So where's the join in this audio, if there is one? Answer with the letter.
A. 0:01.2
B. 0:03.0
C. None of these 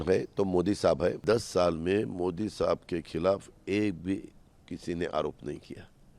A